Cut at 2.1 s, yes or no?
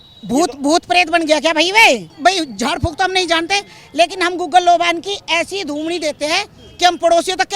yes